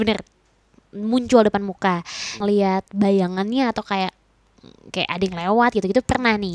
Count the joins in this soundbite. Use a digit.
1